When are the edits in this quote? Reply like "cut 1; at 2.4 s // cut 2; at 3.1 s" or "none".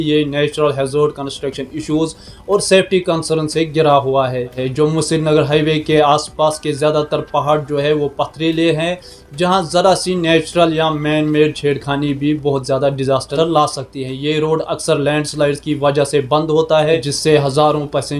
none